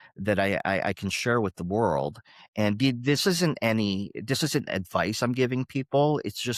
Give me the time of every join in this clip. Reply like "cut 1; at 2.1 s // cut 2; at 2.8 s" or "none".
none